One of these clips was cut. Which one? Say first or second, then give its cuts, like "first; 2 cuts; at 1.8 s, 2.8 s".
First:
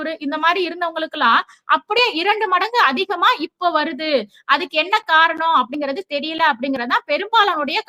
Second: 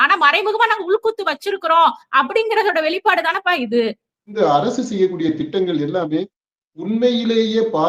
second; 1 cut; at 4.3 s